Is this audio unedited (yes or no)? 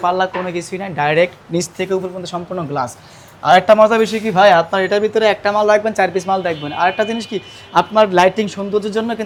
yes